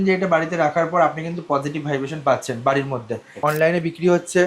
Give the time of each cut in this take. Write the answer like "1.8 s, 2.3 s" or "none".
3.4 s